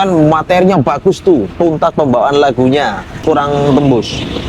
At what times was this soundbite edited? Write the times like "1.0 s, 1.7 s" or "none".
3.2 s